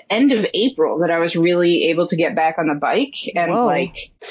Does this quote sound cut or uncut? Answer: uncut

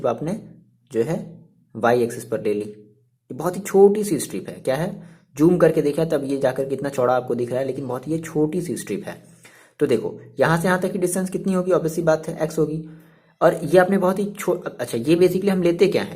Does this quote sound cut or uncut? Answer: uncut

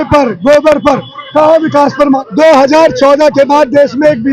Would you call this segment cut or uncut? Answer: cut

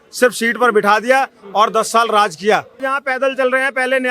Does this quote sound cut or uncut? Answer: cut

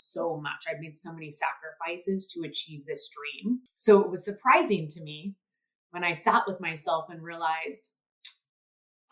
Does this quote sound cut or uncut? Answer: cut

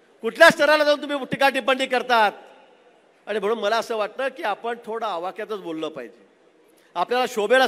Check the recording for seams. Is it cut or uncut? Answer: uncut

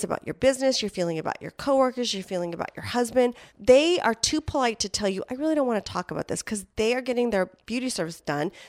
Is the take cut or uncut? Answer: uncut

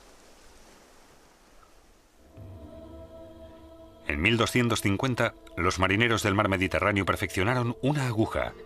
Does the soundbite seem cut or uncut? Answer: cut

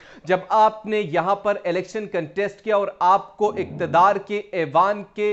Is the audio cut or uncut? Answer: uncut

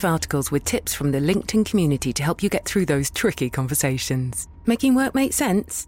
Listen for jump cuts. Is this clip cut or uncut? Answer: uncut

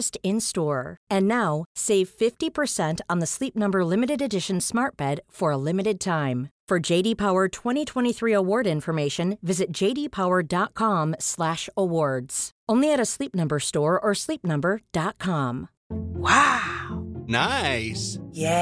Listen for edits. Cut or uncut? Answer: uncut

